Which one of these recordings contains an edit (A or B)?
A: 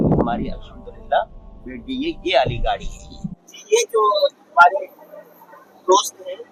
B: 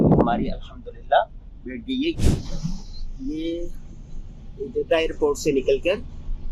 B